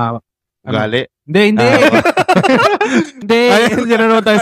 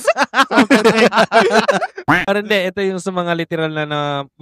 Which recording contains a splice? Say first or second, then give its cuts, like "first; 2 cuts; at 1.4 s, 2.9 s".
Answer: second; 1 cut; at 2.1 s